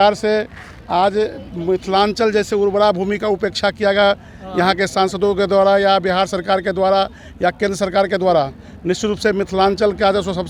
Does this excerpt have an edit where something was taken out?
no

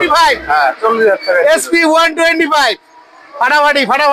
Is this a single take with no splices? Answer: yes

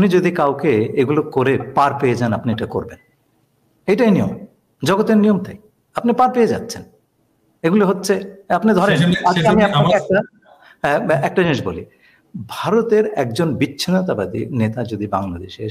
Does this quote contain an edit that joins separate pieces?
no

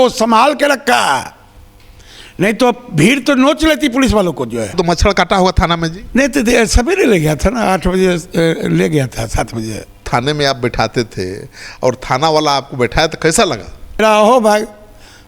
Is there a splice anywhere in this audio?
yes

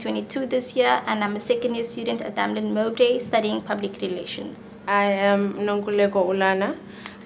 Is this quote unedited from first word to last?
yes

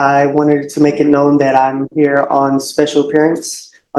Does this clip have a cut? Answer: no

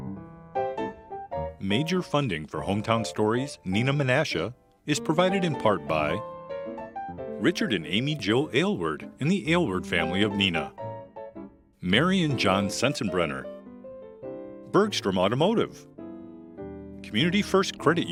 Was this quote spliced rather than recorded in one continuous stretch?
no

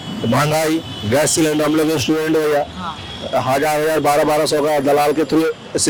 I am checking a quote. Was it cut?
no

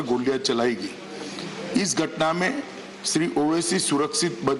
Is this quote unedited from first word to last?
no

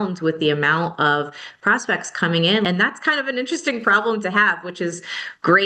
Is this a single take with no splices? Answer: no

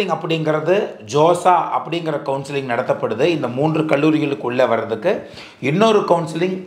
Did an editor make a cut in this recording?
no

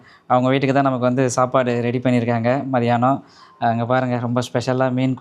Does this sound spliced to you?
no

